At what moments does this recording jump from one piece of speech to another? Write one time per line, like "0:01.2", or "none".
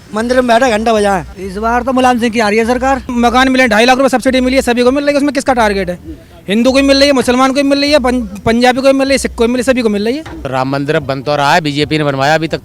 0:01.2
0:03.1
0:10.3